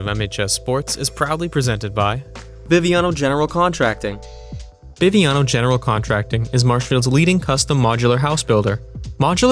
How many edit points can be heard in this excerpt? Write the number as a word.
one